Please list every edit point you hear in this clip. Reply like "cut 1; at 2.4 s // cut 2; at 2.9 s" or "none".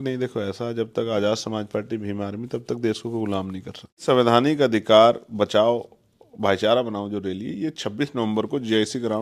cut 1; at 4.0 s